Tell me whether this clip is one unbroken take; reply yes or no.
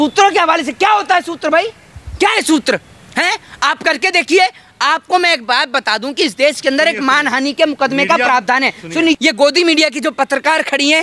no